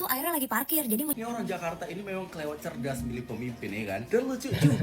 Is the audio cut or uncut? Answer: cut